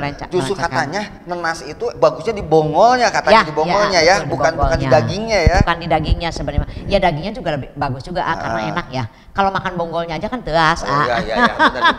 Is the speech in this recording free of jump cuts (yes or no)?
yes